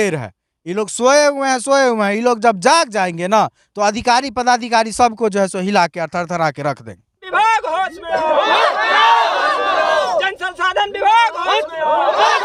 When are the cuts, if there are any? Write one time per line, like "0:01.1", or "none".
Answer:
none